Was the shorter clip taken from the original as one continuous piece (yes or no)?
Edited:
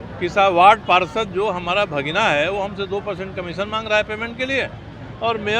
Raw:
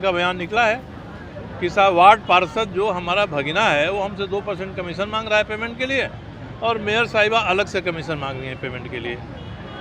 yes